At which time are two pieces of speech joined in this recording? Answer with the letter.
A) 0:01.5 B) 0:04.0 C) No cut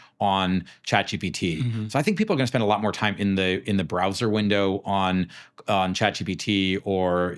C